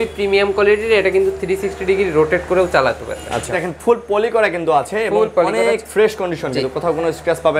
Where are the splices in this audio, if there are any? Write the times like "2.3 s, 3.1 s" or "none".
3.6 s